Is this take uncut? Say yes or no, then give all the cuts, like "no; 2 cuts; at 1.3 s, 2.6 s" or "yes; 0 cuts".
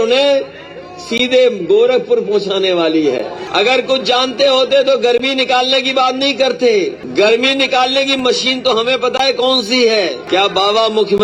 no; 3 cuts; at 3.4 s, 7.0 s, 10.2 s